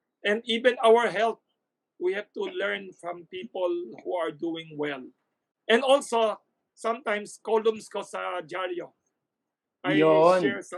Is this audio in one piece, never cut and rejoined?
yes; 0 cuts

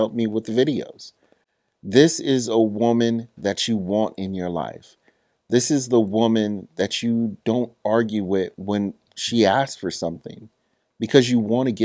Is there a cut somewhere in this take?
no; 0 cuts

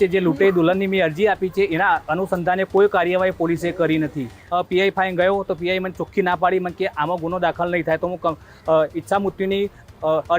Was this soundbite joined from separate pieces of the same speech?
yes; 1 cut; at 4.3 s

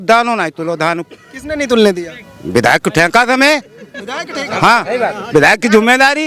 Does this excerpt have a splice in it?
no; 0 cuts

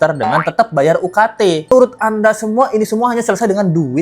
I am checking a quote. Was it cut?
yes; 1 cut; at 1.7 s

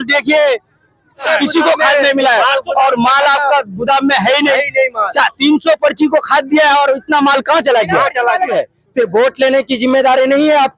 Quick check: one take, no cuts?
no; 2 cuts; at 1.3 s, 8.5 s

